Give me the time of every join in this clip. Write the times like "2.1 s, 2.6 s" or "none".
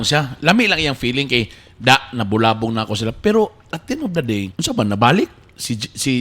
4.5 s